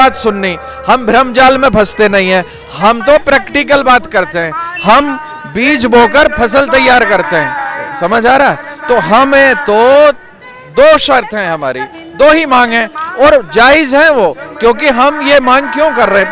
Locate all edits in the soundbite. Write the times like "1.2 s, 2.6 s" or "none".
none

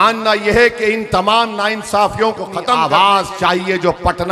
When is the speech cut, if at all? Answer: 2.8 s

